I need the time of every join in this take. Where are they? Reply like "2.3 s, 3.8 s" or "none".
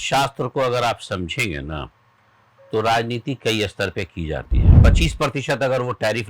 4.8 s

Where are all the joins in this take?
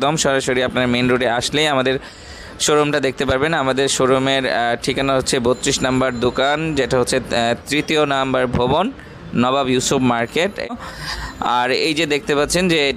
10.7 s

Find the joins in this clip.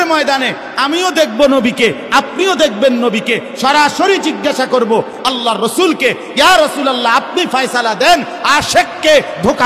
none

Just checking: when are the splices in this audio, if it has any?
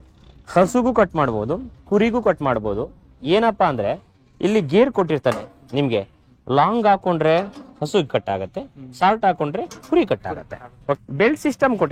11.0 s

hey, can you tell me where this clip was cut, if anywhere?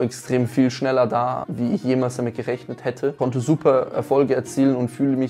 1.5 s, 3.2 s

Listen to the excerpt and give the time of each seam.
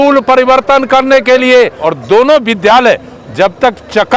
1.9 s

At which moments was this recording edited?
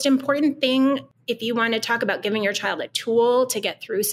1.1 s

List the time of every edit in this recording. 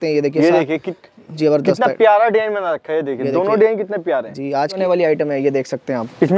4.8 s

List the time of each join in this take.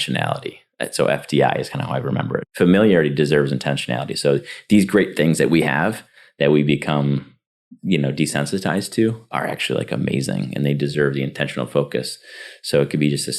2.5 s

